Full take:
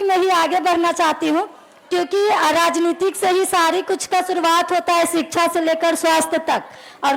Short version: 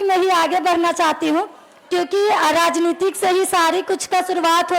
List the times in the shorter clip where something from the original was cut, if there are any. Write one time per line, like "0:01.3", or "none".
none